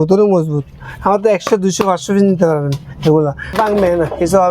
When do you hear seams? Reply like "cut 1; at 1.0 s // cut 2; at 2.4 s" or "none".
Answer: cut 1; at 3.5 s